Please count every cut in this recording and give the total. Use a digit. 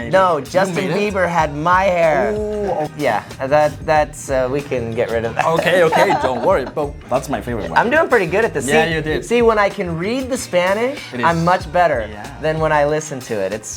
2